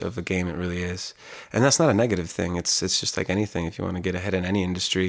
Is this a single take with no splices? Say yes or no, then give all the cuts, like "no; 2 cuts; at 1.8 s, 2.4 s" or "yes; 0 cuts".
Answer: yes; 0 cuts